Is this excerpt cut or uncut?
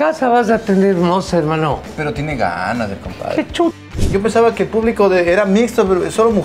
cut